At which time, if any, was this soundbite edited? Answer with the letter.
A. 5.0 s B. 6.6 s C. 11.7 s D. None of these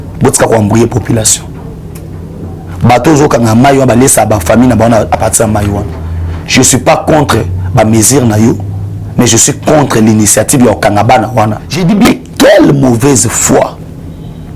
C